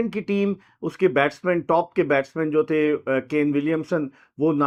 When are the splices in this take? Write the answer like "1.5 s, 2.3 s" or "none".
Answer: none